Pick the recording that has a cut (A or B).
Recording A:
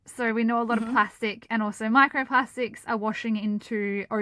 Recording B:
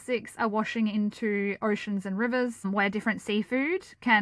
B